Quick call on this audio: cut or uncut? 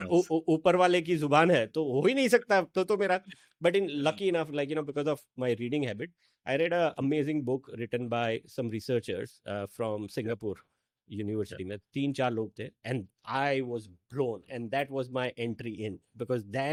uncut